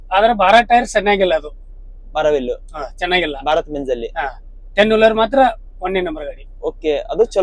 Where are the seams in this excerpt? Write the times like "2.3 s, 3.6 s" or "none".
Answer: none